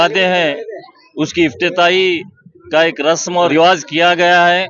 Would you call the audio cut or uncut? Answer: cut